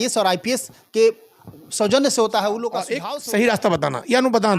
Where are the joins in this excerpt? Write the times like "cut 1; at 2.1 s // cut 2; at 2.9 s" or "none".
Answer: cut 1; at 3.0 s